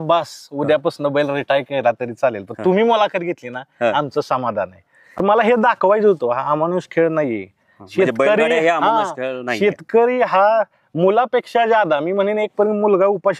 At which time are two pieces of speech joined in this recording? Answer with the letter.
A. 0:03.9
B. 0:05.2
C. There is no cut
B